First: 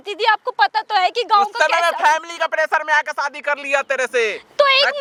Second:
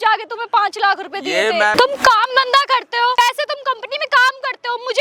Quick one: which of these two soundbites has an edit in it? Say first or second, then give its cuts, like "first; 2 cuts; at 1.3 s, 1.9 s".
second; 2 cuts; at 1.7 s, 3.2 s